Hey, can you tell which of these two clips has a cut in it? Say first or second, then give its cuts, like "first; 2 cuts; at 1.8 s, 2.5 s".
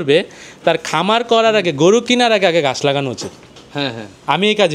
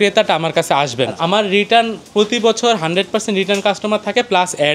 second; 1 cut; at 1.1 s